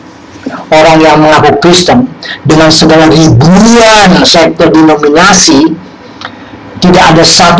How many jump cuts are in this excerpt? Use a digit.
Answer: 0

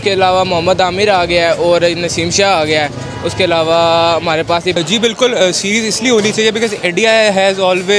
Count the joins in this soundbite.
1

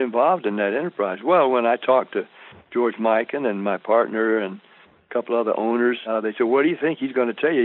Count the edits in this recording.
1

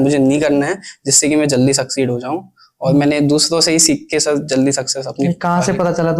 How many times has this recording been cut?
0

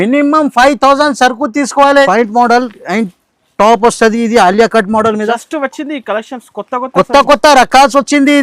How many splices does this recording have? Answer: 1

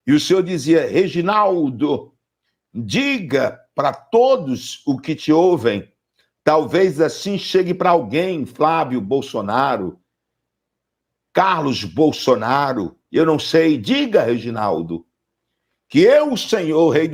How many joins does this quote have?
0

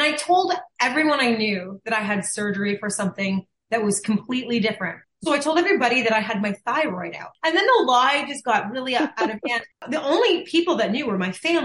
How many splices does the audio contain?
3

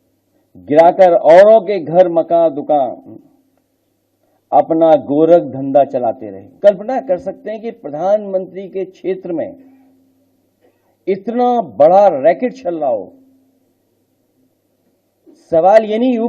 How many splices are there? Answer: 1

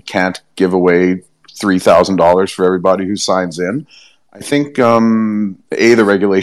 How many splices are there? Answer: 0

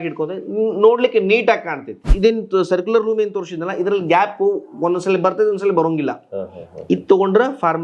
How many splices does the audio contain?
1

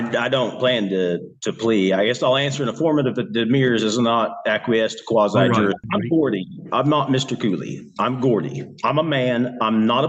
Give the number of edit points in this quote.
1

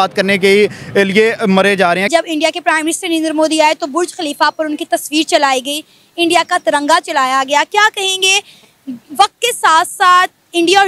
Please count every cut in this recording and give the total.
1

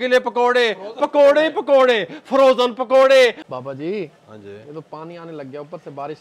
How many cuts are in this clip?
1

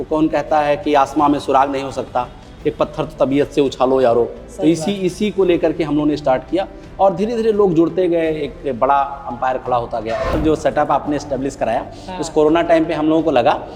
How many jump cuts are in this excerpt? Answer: 1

